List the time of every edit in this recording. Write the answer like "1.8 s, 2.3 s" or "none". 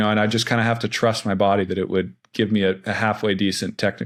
none